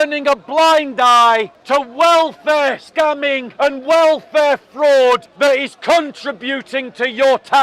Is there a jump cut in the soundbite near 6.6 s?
no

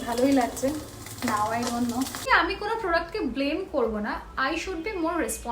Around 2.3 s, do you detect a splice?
yes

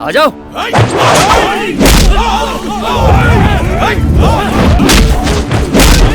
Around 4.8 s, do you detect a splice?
yes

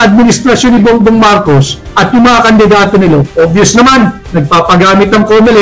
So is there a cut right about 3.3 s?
yes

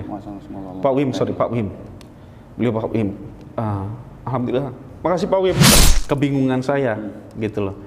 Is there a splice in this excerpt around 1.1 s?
no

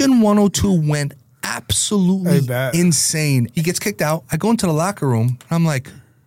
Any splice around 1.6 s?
no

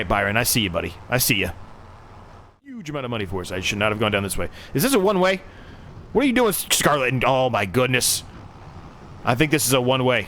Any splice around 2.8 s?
yes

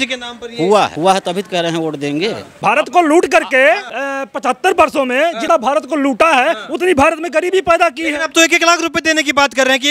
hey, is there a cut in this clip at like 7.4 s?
no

